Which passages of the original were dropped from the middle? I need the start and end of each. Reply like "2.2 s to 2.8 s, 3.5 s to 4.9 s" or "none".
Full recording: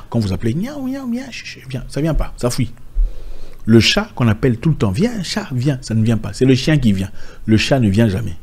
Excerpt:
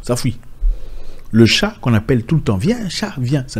none